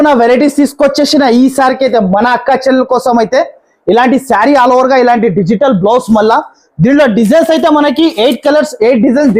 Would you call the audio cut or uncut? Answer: uncut